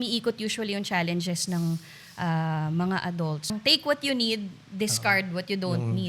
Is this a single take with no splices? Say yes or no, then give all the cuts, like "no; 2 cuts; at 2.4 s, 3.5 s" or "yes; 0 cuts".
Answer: no; 1 cut; at 3.5 s